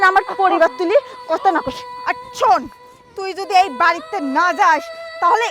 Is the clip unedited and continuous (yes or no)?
no